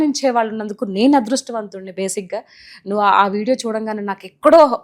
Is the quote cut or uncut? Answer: uncut